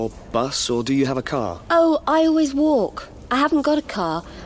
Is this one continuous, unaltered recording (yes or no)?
yes